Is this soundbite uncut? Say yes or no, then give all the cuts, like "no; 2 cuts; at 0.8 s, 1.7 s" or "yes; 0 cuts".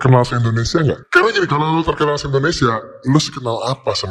no; 1 cut; at 1.1 s